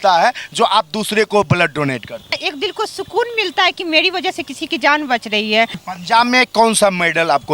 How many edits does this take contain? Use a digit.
2